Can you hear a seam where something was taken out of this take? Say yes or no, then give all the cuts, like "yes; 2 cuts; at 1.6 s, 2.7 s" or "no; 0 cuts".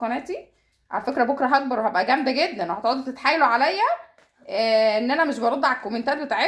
no; 0 cuts